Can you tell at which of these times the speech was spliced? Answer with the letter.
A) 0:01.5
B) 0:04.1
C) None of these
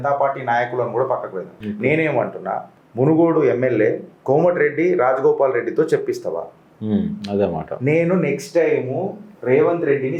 C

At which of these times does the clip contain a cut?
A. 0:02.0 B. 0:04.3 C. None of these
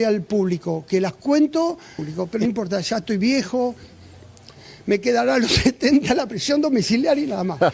A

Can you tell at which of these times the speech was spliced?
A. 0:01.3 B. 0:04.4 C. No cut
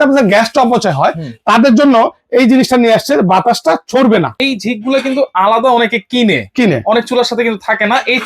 B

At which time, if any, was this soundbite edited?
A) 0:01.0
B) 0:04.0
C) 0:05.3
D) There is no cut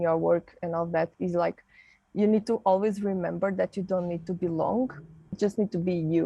C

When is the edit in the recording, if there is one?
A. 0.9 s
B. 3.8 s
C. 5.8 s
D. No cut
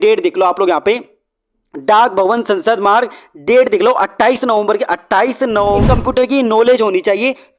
C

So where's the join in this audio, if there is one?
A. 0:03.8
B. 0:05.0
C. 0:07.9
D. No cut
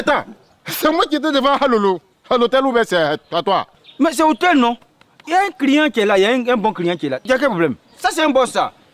C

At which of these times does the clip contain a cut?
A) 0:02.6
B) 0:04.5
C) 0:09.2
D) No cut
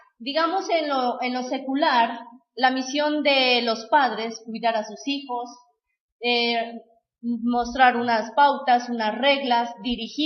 B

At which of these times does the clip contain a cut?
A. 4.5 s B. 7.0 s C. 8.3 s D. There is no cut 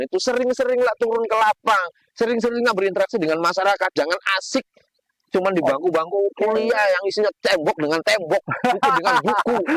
D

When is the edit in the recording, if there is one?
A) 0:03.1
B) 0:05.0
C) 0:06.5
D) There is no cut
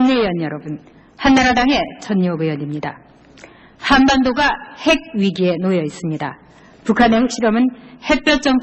D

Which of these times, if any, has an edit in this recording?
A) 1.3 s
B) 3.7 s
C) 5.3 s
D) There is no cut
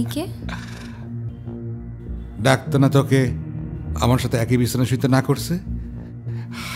A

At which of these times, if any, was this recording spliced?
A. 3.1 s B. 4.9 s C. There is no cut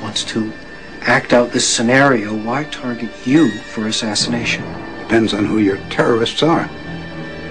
C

